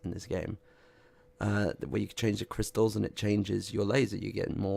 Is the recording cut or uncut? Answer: uncut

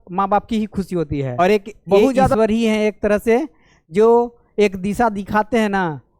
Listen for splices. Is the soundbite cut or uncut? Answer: cut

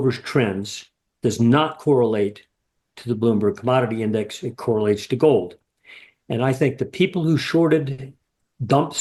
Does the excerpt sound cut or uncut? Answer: uncut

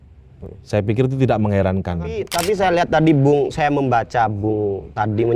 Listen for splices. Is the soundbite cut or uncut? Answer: cut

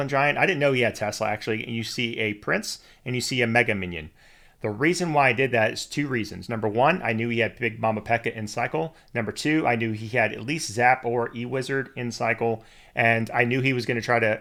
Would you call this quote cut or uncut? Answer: uncut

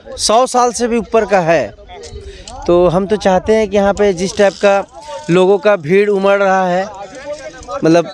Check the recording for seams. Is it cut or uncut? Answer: uncut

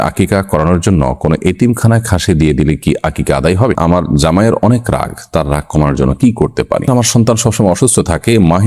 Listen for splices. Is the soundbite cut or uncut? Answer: cut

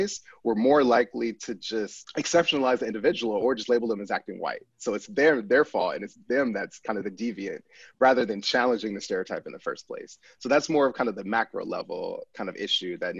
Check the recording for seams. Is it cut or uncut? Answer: cut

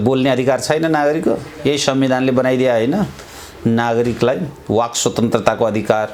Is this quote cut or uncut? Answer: uncut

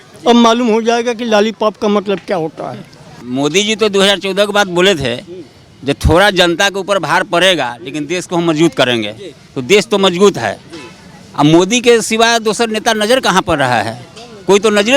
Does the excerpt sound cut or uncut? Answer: cut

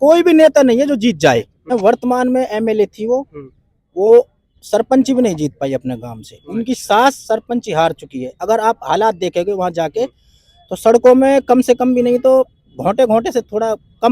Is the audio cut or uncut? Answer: cut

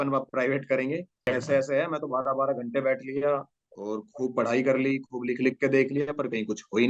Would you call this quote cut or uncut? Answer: cut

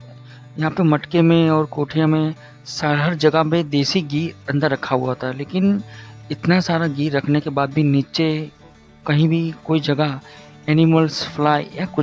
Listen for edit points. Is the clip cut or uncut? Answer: uncut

